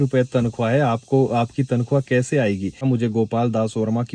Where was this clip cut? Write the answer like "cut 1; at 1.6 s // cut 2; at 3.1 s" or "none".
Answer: cut 1; at 2.8 s